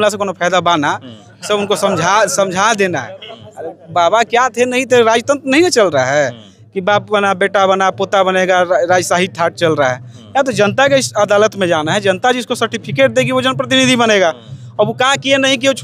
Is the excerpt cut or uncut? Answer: uncut